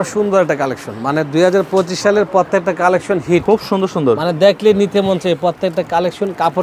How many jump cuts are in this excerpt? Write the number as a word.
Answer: zero